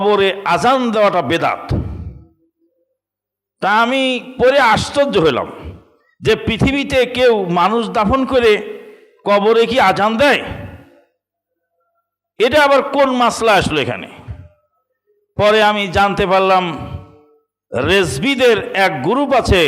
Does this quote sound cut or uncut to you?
uncut